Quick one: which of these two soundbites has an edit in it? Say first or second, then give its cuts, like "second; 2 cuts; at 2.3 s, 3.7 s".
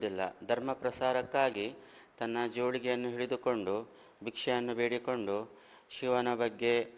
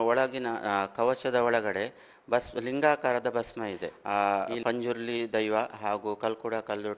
second; 1 cut; at 3.9 s